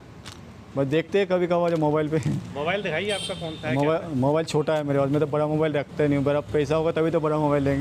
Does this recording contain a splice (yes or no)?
no